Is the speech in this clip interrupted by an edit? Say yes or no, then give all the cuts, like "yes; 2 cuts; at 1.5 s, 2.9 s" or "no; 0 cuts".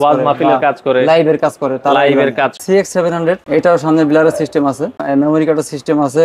yes; 3 cuts; at 2.6 s, 3.4 s, 5.0 s